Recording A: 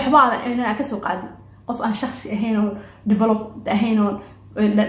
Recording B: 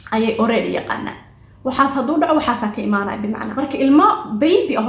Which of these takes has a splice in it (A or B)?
B